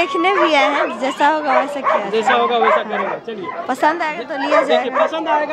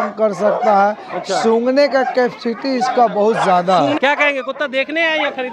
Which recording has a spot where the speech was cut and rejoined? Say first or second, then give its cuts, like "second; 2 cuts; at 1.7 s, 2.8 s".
second; 1 cut; at 4.0 s